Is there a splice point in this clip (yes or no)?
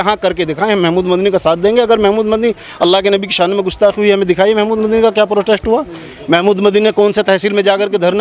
no